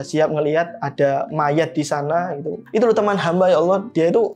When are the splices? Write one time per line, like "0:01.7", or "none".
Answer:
0:02.6